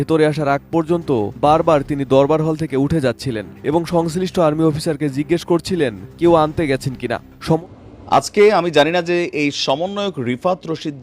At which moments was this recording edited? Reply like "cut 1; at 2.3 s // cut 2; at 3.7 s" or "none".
cut 1; at 7.6 s